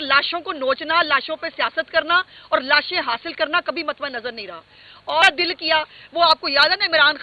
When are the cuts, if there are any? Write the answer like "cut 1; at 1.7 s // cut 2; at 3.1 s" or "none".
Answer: cut 1; at 5.2 s